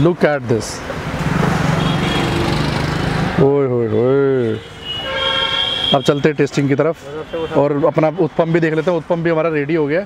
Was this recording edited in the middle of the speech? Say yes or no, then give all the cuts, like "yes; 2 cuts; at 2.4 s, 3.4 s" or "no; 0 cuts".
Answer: no; 0 cuts